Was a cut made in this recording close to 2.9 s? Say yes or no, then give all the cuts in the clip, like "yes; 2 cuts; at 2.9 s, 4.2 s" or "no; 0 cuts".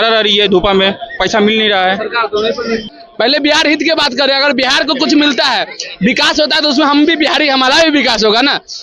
yes; 1 cut; at 2.9 s